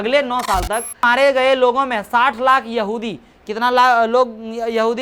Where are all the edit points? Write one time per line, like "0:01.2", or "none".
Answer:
0:01.0